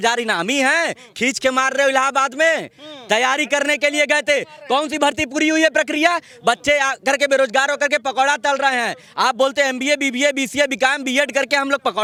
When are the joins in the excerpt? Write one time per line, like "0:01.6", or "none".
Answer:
none